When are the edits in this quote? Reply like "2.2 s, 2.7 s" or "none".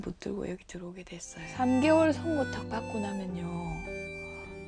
1.4 s